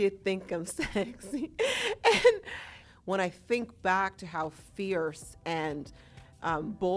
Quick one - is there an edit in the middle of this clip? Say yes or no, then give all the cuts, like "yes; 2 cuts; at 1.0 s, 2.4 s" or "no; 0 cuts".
yes; 1 cut; at 2.8 s